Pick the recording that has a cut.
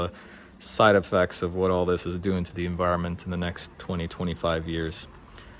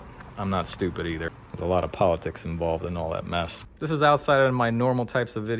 second; 2 cuts; at 1.4 s, 3.6 s

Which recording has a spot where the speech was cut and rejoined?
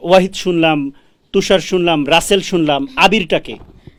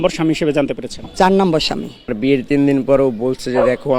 second; 1 cut; at 2.0 s

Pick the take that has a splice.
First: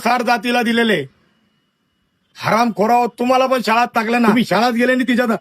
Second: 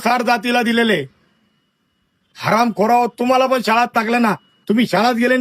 first; 1 cut; at 4.3 s

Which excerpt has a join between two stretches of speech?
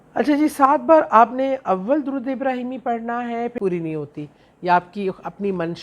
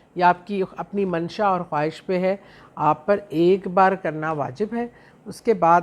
first; 1 cut; at 3.6 s

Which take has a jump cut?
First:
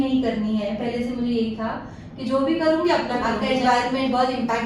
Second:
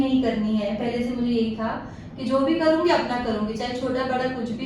first; 1 cut; at 3.3 s

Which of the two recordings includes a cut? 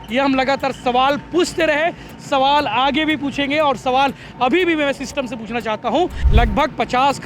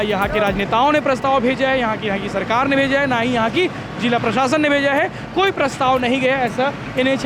first; 1 cut; at 6.2 s

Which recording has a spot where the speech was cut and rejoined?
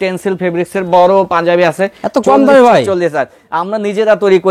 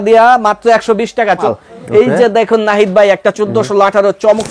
second; 1 cut; at 1.5 s

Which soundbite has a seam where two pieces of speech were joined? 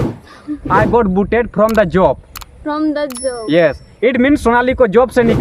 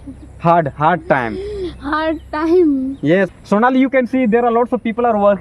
second; 1 cut; at 3.3 s

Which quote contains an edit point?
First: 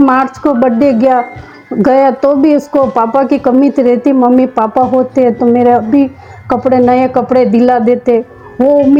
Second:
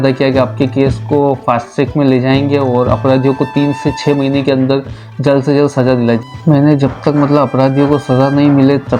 second; 1 cut; at 6.2 s

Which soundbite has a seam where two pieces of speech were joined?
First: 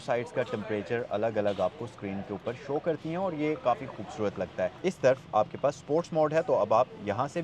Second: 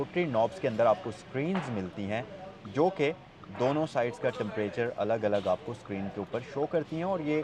first; 1 cut; at 4.8 s

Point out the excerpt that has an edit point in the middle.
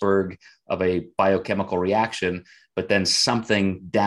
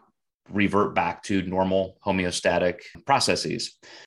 second; 1 cut; at 3.0 s

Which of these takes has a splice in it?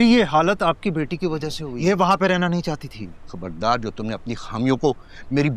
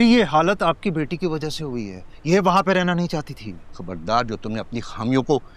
first; 1 cut; at 1.6 s

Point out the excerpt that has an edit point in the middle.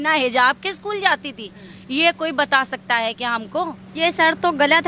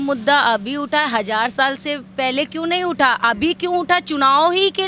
first; 1 cut; at 3.8 s

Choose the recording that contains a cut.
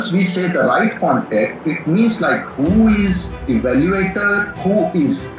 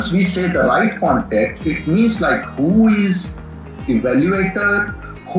first; 2 cuts; at 3.3 s, 4.5 s

